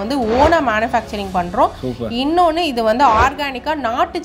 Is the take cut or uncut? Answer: uncut